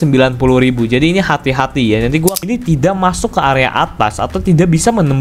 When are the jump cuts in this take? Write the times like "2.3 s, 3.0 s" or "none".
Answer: 2.4 s